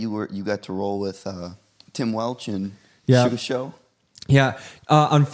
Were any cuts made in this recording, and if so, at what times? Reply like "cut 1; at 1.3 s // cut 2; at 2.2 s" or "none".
none